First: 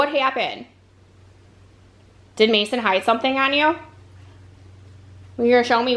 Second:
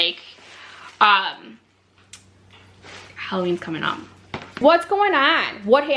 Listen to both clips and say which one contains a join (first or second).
second